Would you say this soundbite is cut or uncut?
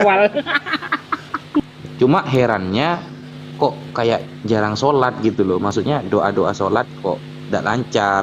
cut